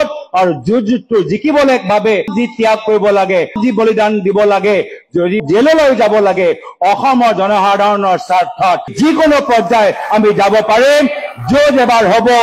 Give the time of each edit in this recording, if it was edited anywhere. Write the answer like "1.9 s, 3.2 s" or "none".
2.3 s, 3.6 s, 5.4 s, 8.9 s